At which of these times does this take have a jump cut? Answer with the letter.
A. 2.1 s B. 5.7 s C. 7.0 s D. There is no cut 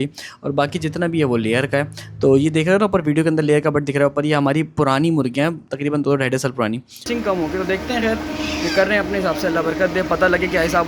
C